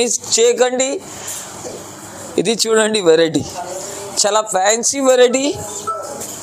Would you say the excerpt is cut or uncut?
uncut